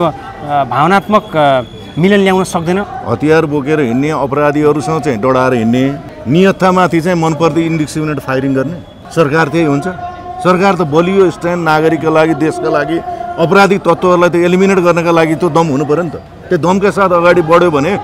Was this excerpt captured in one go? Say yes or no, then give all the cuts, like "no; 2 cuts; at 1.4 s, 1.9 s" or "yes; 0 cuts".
no; 3 cuts; at 2.9 s, 6.1 s, 8.9 s